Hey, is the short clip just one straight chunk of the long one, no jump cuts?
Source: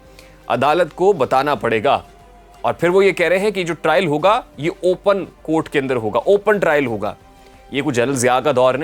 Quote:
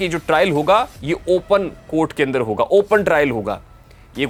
yes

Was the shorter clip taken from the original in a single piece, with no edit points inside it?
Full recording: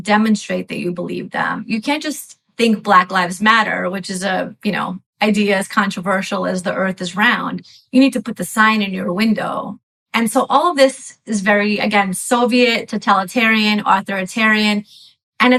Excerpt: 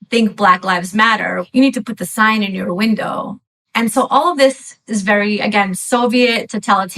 no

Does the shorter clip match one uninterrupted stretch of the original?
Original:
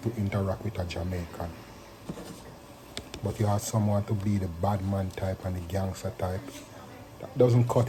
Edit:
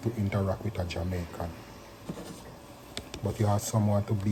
yes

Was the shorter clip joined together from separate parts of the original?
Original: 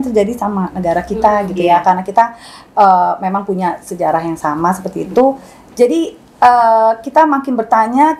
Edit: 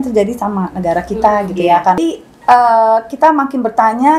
yes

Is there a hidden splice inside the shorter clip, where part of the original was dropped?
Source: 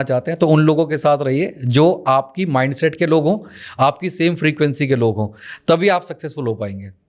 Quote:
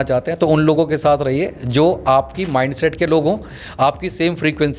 no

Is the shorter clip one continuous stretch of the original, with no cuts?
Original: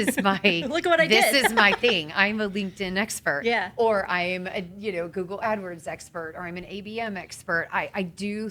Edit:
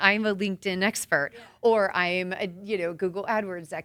yes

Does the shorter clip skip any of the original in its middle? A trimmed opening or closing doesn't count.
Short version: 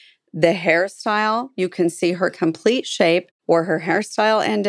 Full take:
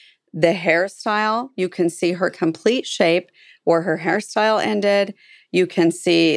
yes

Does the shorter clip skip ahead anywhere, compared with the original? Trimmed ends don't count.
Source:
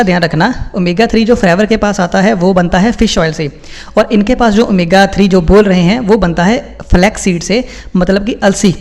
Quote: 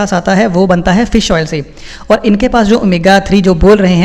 no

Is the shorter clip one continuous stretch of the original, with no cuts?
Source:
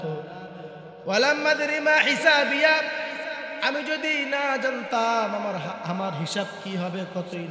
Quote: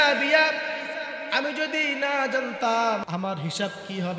no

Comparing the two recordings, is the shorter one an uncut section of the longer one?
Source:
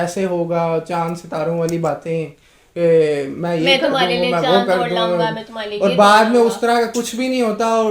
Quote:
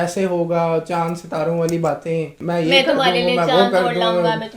no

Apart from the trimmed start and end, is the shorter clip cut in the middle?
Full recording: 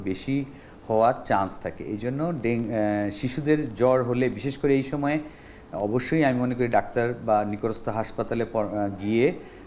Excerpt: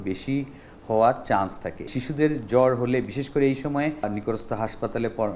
yes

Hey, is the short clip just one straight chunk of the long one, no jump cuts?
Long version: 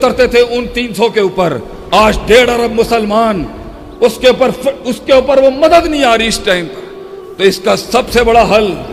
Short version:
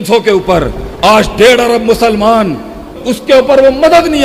no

